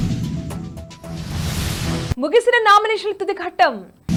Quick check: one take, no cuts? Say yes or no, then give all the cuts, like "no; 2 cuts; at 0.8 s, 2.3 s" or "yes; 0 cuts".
yes; 0 cuts